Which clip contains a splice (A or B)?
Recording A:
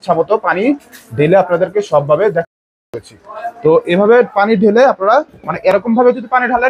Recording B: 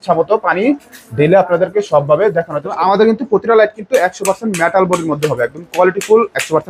B